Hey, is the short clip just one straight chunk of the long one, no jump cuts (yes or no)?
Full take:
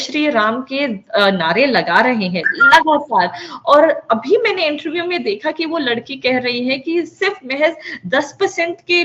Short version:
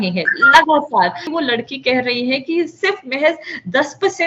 no